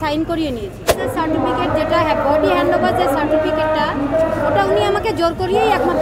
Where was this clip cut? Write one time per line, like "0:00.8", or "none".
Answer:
0:01.0